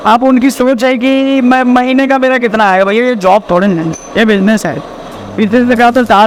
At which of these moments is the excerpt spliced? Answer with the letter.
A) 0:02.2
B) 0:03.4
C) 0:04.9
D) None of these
D